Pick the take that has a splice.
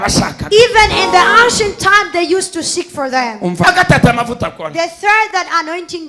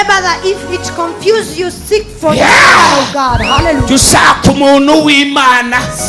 first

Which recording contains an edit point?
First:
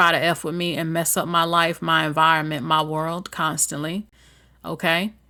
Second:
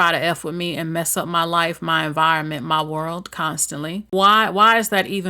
second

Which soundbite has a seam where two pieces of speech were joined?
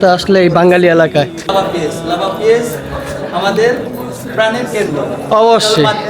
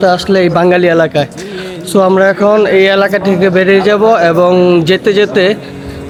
first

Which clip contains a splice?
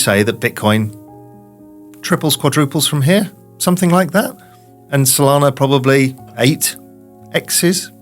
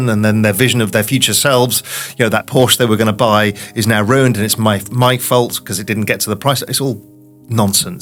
first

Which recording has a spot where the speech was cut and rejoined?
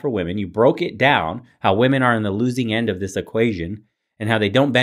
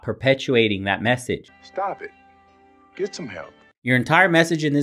second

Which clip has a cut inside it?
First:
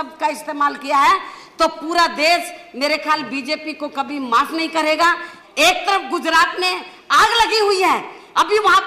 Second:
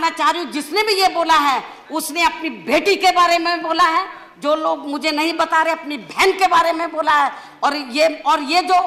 first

